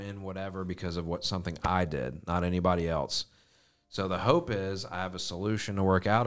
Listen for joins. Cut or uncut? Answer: uncut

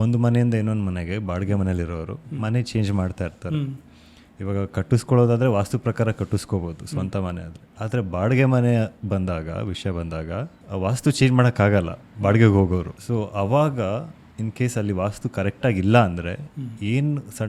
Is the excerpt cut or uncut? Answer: cut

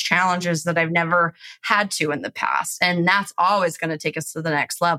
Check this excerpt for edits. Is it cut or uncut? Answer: uncut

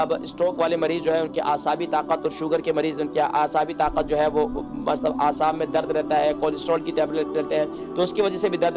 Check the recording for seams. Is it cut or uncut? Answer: uncut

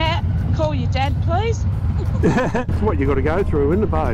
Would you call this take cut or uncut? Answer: cut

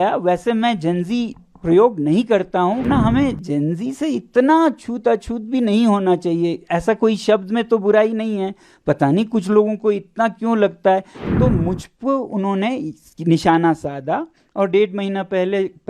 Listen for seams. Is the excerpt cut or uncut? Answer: cut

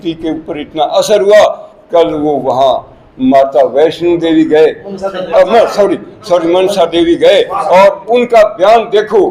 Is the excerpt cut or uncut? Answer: uncut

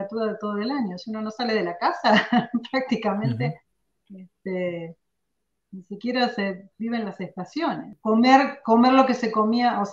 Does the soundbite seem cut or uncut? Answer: cut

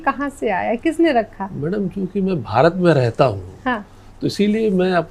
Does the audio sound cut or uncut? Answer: uncut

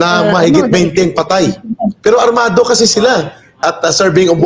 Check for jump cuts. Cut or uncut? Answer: cut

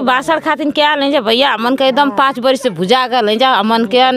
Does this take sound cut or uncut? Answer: uncut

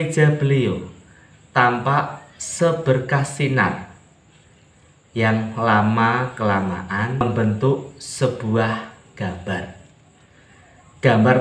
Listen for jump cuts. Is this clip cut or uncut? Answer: cut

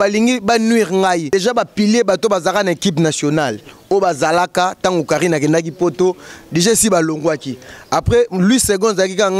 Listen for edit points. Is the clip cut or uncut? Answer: cut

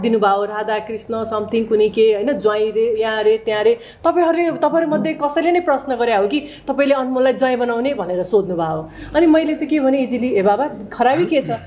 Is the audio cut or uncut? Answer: uncut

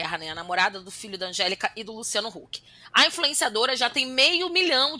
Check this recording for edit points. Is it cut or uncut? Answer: uncut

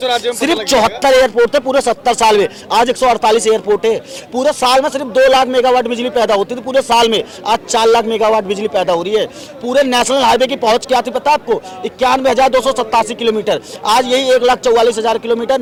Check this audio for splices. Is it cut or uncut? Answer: uncut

